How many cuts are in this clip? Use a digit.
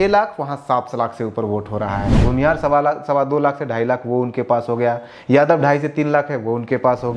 1